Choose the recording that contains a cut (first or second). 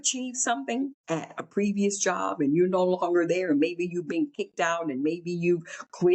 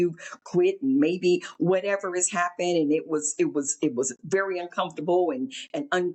first